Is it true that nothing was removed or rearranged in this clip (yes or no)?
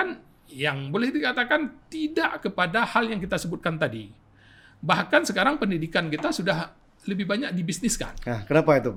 yes